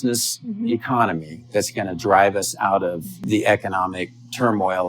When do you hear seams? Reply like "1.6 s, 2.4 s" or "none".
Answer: 3.1 s